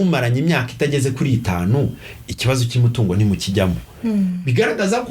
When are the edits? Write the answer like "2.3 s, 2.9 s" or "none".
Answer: none